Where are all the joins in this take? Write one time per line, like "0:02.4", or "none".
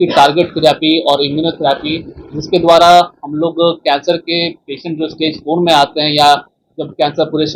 none